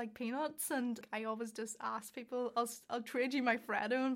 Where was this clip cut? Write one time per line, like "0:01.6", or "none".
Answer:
0:01.1